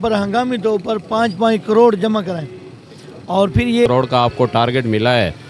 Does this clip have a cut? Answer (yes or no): yes